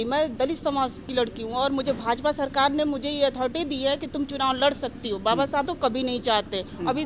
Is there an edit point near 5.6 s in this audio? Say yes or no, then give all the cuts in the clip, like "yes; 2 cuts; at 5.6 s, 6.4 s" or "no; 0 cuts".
yes; 1 cut; at 5.6 s